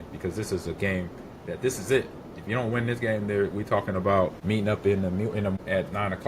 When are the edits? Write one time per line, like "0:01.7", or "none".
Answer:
0:04.4
0:05.5